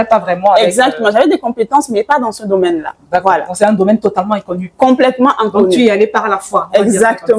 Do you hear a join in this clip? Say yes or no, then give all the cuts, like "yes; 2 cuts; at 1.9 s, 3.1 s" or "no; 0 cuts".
no; 0 cuts